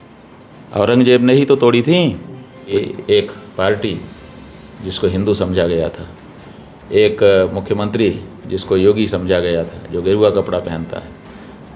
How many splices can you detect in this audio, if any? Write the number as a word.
one